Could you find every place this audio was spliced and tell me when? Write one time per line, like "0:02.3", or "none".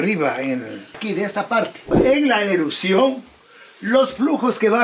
0:00.9
0:01.8